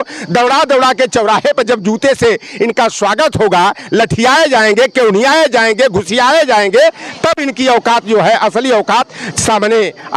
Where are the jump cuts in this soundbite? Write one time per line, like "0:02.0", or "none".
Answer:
none